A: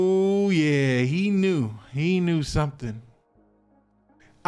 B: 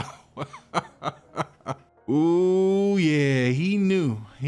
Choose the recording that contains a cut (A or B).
B